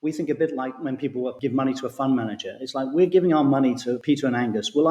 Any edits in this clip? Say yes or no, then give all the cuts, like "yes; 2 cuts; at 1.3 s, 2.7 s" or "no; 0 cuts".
yes; 2 cuts; at 1.3 s, 4.0 s